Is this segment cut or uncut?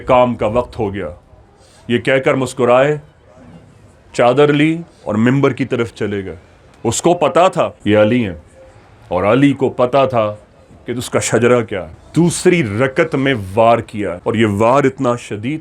cut